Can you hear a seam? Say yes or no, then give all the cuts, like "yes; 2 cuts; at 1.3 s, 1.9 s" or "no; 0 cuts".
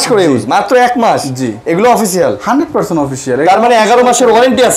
no; 0 cuts